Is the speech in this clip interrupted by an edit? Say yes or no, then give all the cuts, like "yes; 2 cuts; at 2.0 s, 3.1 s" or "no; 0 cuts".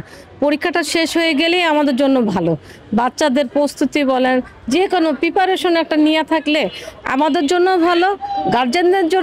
no; 0 cuts